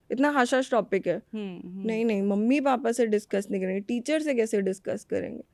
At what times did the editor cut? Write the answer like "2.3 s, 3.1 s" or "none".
none